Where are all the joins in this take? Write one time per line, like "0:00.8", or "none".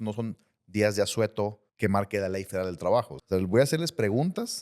0:01.6
0:03.2